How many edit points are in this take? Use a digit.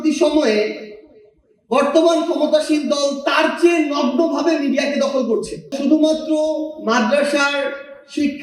1